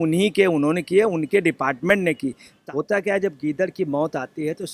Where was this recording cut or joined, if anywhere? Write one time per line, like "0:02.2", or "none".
0:02.5